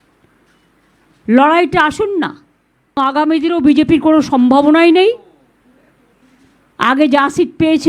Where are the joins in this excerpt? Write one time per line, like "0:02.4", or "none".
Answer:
0:03.0